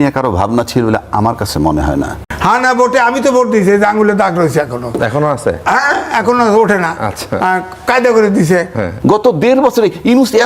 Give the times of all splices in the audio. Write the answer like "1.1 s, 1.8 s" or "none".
2.3 s, 8.9 s